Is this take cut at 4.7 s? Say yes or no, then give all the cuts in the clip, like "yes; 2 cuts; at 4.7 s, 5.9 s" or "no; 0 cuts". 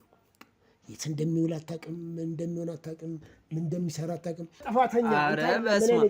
yes; 1 cut; at 4.7 s